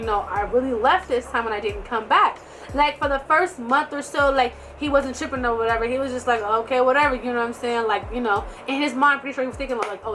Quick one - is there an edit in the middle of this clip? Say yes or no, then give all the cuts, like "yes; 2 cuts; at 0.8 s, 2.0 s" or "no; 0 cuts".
no; 0 cuts